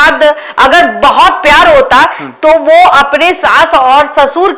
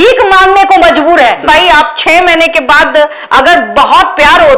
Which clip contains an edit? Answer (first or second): second